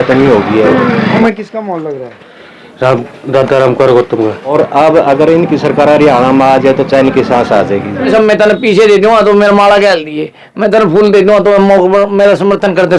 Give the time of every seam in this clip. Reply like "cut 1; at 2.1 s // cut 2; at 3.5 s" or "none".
cut 1; at 1.2 s // cut 2; at 4.5 s // cut 3; at 8.1 s